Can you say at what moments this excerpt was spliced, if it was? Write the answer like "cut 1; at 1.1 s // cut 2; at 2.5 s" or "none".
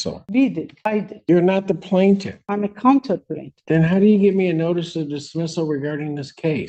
none

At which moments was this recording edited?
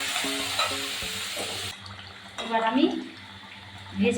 cut 1; at 1.7 s

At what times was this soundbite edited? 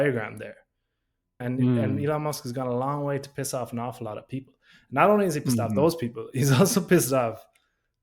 cut 1; at 1.4 s

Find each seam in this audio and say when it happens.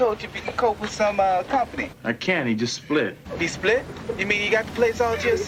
none

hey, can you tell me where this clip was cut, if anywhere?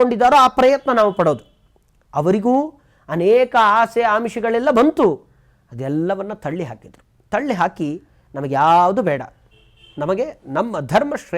none

